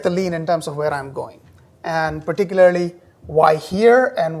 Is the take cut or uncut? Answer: cut